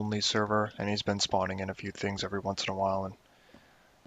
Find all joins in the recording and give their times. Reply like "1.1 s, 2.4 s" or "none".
1.2 s